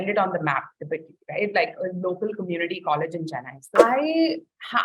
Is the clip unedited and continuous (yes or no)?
no